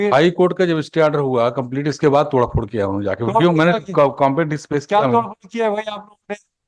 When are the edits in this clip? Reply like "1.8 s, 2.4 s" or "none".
none